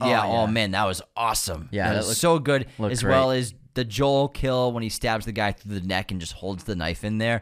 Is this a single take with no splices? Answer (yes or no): yes